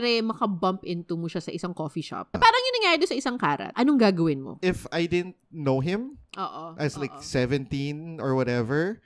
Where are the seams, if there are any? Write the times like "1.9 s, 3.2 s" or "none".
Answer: 2.3 s, 3.7 s, 4.5 s